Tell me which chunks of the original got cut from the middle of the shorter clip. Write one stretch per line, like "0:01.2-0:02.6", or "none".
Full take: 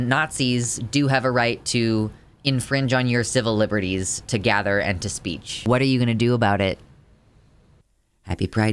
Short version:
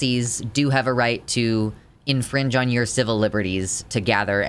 none